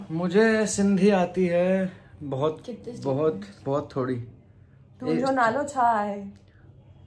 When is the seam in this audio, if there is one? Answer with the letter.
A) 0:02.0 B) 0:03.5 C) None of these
C